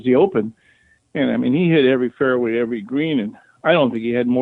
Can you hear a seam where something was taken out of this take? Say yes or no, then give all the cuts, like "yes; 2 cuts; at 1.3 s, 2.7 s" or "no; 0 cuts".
no; 0 cuts